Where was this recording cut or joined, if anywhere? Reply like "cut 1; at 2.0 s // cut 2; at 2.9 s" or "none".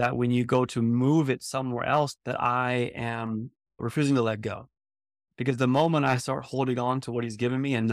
cut 1; at 2.2 s